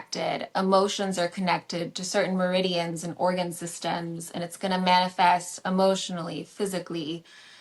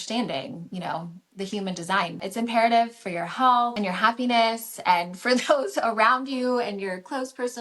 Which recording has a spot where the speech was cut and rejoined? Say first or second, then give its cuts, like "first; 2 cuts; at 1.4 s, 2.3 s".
second; 2 cuts; at 2.3 s, 3.7 s